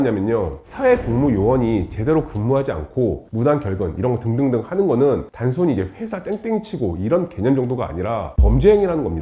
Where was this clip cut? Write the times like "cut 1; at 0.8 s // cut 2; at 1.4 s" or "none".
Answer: none